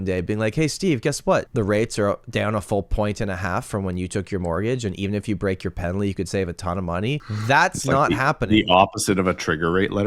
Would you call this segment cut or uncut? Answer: cut